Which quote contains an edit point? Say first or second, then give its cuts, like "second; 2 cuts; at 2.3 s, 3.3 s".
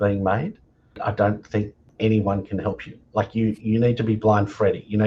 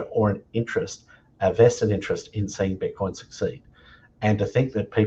first; 2 cuts; at 1.0 s, 1.9 s